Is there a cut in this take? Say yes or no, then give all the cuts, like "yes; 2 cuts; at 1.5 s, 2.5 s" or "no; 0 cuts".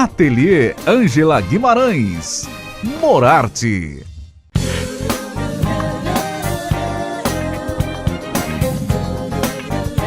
yes; 1 cut; at 4.2 s